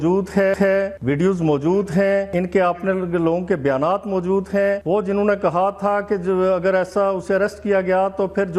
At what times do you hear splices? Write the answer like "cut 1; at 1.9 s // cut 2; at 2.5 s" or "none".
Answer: cut 1; at 1.0 s // cut 2; at 2.3 s // cut 3; at 4.8 s